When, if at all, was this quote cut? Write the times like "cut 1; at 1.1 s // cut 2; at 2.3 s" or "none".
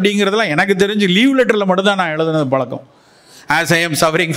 none